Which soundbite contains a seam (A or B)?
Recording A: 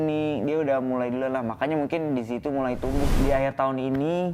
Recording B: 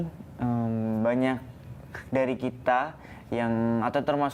A